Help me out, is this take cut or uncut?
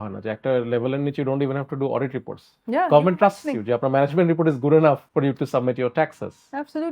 cut